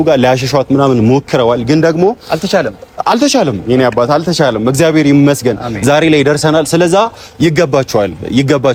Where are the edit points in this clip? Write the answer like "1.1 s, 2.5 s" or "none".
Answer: none